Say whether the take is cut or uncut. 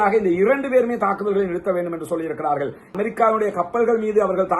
cut